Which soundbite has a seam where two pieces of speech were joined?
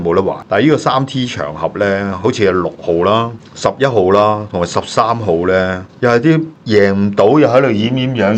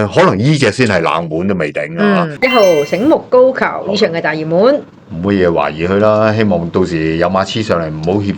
second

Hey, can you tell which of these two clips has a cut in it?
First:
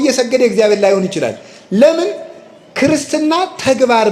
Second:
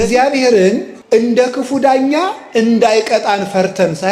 second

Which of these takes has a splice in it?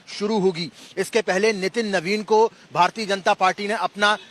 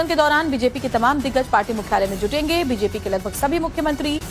second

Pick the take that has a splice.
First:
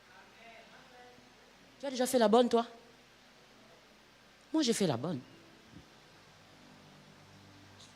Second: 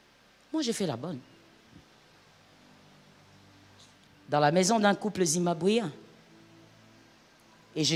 first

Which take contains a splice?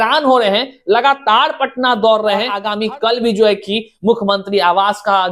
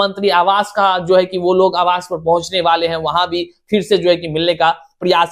first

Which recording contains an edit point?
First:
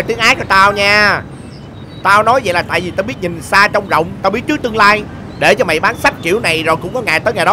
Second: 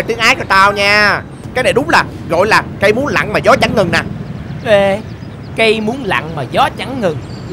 second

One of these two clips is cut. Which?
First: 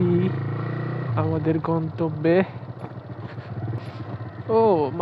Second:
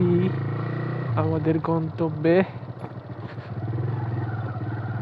first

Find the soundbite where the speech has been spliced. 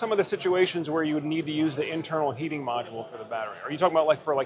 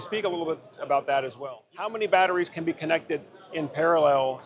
second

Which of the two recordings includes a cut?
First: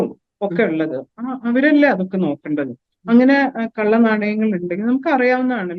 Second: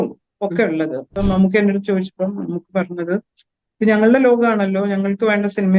second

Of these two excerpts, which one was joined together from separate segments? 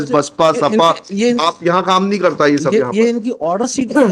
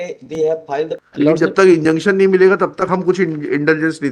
second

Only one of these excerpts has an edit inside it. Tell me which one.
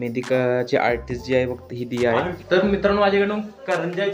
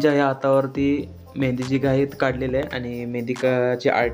first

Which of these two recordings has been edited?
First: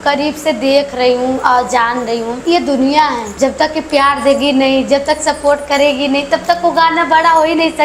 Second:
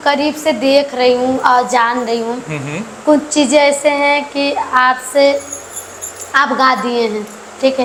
first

